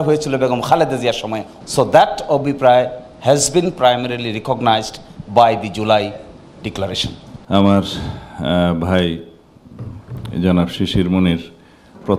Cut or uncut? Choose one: cut